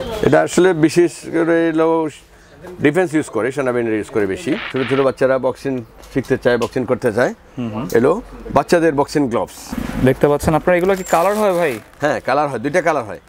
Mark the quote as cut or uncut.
cut